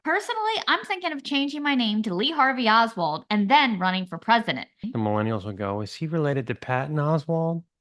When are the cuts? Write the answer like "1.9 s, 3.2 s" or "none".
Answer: 4.8 s